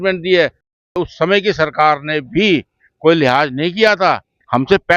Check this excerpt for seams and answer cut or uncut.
cut